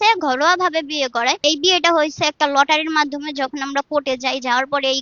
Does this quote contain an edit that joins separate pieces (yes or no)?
yes